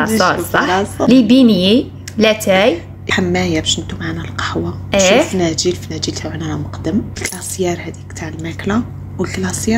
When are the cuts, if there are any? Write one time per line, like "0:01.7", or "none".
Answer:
0:01.1
0:03.1
0:07.2